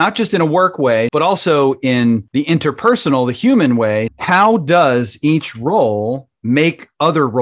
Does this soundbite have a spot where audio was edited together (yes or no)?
yes